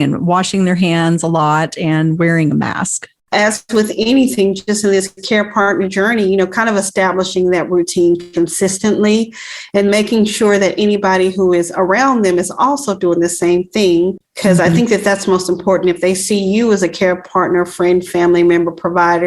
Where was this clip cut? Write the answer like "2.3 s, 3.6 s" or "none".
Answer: 3.3 s, 14.3 s